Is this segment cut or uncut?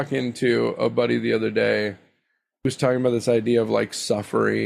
uncut